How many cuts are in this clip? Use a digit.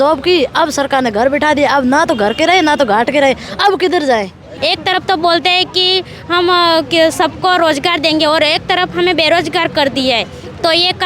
1